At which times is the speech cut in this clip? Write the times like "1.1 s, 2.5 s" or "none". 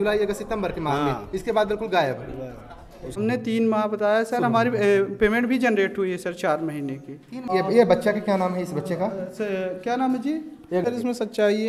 3.0 s, 7.4 s, 10.9 s

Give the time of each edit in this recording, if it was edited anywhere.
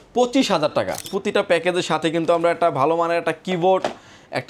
1.0 s

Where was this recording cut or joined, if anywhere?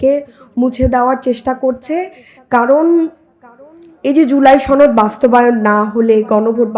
none

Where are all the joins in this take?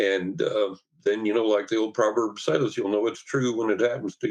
none

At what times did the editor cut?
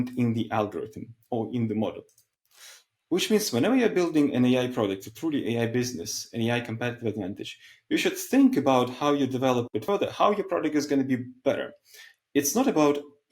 none

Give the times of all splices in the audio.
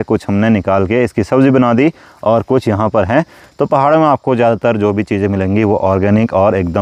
none

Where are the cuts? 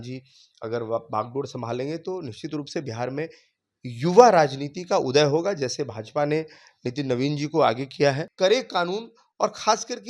8.3 s

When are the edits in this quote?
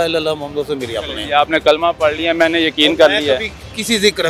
none

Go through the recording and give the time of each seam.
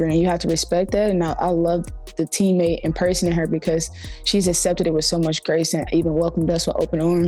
1.3 s

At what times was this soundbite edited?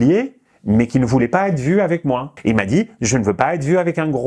2.3 s

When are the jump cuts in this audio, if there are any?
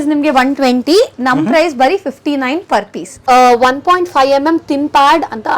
3.1 s

